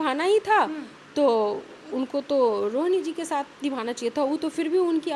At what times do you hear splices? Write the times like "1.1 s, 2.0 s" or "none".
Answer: none